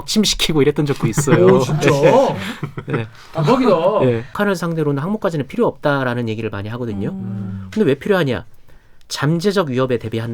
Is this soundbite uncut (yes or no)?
no